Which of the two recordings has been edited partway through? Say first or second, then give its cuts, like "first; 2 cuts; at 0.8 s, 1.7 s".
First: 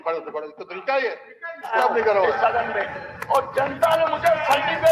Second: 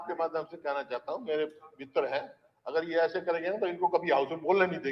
first; 1 cut; at 1.7 s